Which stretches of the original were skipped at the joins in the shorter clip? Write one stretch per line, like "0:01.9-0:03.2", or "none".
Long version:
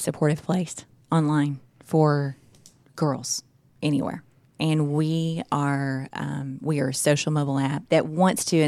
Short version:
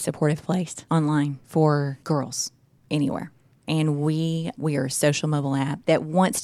0:01.1-0:01.5
0:02.3-0:02.9
0:05.4-0:06.5